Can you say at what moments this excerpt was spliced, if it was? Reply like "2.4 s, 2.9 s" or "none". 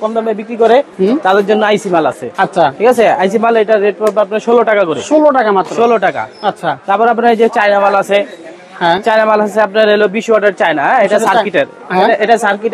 none